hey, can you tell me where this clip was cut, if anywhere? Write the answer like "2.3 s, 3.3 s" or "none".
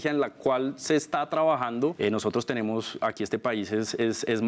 1.9 s